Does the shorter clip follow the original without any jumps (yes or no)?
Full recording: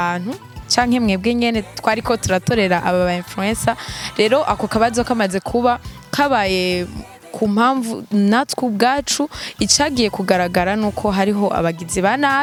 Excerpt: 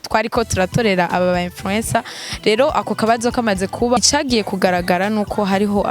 no